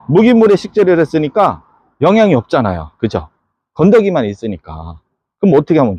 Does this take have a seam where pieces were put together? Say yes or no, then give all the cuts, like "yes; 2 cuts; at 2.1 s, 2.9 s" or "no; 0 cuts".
no; 0 cuts